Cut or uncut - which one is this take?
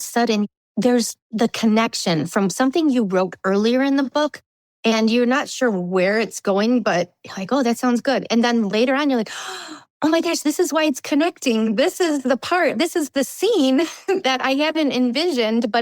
cut